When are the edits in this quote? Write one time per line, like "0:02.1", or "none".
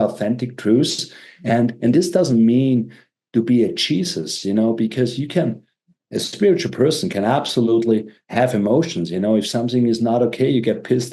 none